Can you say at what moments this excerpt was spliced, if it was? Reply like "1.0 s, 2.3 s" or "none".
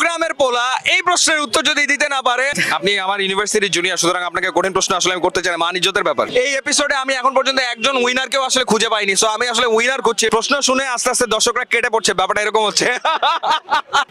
2.6 s, 6.3 s, 10.3 s

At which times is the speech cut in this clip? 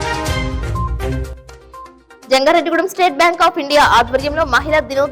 1.3 s

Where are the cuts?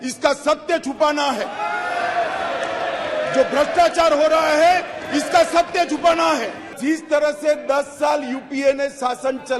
6.8 s

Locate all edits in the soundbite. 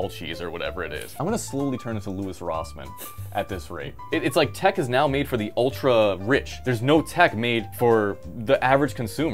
1.0 s, 3.9 s, 6.6 s, 8.0 s

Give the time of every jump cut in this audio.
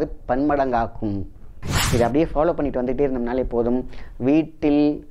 1.7 s

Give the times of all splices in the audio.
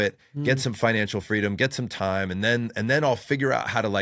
none

